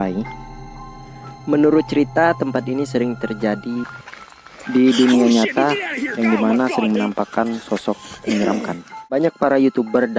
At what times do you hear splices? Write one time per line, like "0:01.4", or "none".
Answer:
0:09.0